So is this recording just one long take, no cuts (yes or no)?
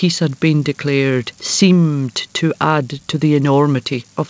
no